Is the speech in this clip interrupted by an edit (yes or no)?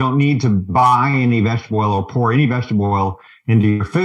no